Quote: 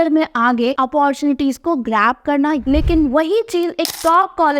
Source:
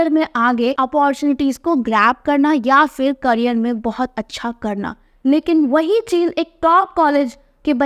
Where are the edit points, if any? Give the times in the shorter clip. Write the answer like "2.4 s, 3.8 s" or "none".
2.6 s

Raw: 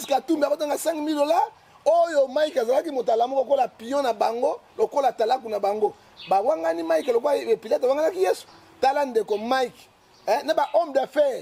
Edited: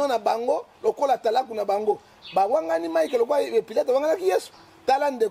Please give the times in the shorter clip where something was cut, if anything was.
none

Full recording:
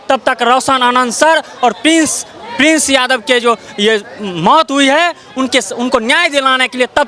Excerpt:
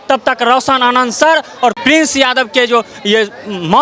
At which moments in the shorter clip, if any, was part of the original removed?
1.8 s

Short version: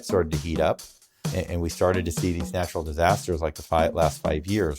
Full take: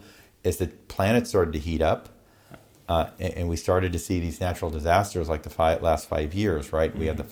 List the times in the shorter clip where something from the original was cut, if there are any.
1.3 s

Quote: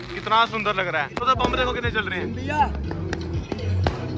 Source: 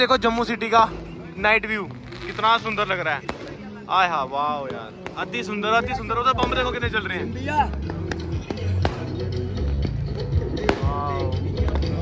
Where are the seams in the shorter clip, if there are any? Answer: 1.2 s

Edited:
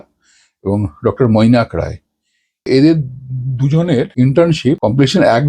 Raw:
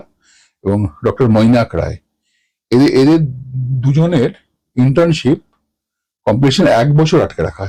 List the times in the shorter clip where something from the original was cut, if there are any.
2.7 s, 4.1 s, 4.8 s

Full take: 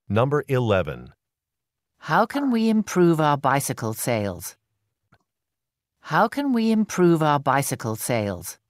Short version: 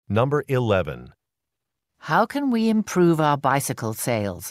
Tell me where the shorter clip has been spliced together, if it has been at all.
none

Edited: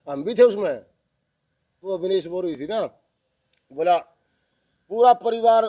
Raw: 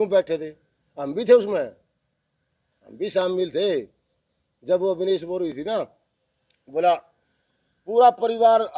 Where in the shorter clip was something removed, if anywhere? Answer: 1.9 s

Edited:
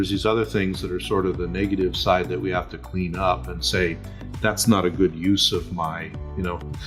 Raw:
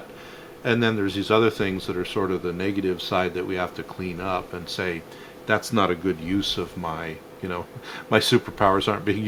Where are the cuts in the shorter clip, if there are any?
none

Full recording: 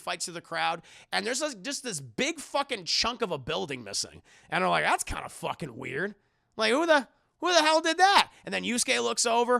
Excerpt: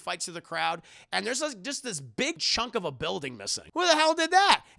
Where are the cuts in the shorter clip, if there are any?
2.4 s, 3.6 s

